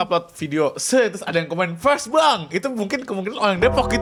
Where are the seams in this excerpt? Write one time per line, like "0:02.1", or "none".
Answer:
none